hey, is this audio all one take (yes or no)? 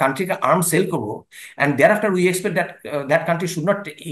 yes